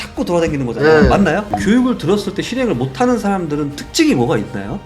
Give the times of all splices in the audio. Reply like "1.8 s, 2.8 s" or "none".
1.4 s